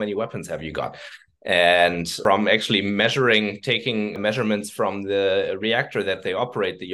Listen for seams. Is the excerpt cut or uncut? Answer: cut